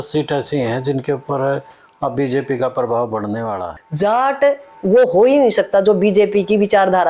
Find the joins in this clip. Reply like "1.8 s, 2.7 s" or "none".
3.7 s

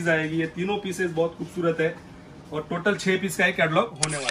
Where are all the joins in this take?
none

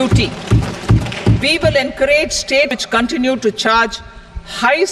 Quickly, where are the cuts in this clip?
2.8 s

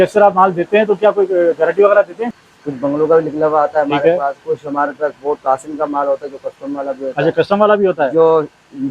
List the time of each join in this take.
2.2 s

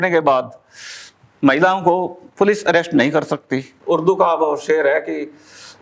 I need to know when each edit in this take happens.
3.7 s

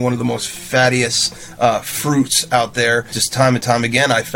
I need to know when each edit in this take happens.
3.2 s

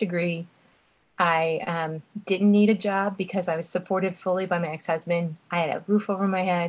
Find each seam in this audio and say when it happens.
none

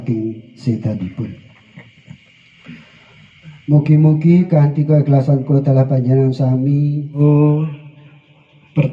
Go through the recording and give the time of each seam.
7.2 s

